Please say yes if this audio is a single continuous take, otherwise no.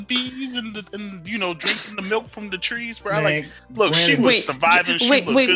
yes